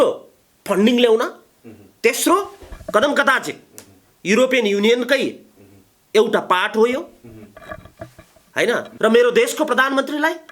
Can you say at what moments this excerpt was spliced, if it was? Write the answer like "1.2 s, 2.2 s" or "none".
8.9 s